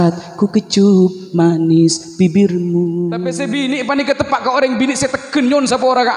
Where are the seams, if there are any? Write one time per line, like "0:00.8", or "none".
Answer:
0:03.3